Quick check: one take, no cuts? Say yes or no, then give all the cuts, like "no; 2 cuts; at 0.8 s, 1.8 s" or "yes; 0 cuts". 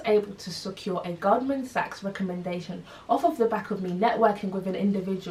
yes; 0 cuts